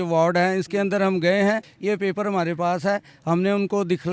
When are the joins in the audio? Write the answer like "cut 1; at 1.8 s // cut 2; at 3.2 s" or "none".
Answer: cut 1; at 1.7 s